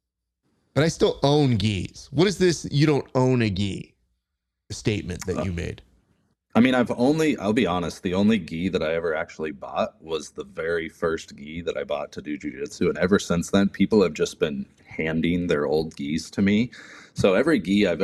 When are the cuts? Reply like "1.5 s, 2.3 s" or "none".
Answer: none